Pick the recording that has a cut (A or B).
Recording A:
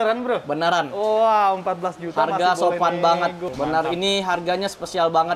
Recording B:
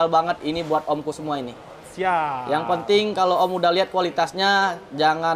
A